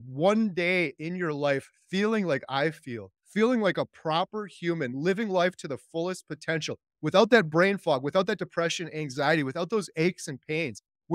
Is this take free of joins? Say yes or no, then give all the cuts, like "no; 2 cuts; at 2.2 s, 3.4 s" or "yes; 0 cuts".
yes; 0 cuts